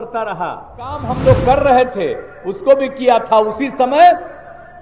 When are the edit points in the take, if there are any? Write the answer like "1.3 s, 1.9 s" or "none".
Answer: 1.1 s